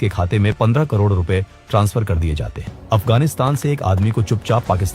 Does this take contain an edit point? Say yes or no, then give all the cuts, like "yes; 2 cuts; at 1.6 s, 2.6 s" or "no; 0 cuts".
yes; 1 cut; at 2.7 s